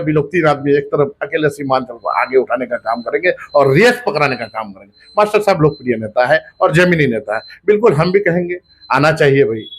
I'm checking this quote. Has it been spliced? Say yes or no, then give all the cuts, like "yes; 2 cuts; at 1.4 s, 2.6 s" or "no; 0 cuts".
no; 0 cuts